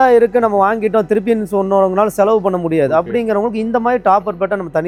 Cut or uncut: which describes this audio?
uncut